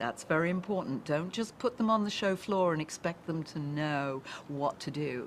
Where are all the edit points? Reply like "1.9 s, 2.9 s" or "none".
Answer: 1.2 s